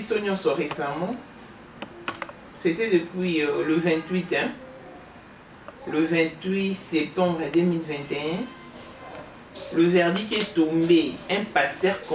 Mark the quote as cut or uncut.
uncut